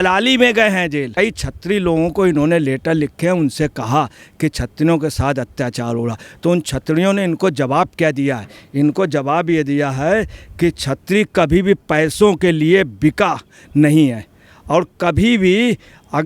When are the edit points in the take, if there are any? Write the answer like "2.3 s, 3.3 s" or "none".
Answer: 1.1 s

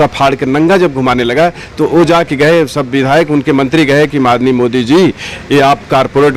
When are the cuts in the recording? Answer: none

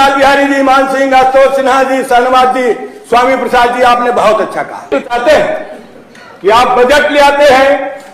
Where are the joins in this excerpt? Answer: 5.0 s

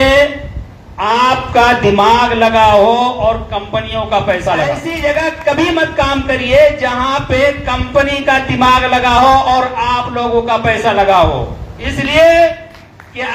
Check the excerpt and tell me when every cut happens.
4.9 s

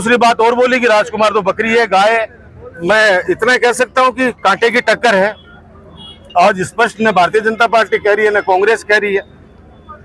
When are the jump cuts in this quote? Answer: 2.8 s

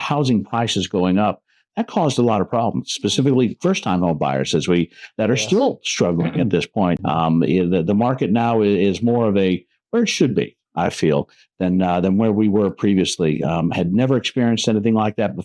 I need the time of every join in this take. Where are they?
7.0 s

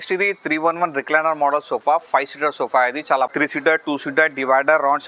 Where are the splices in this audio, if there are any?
3.8 s

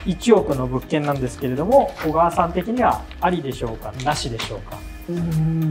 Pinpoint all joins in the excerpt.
none

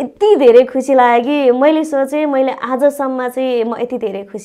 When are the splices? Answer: none

